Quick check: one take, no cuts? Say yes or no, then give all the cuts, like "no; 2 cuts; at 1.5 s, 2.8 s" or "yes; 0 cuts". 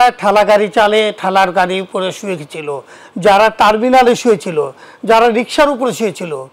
yes; 0 cuts